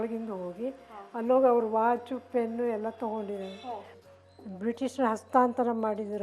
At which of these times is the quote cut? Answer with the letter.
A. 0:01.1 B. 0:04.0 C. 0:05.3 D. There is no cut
B